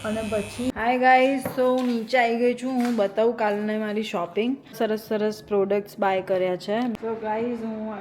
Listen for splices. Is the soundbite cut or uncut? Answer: cut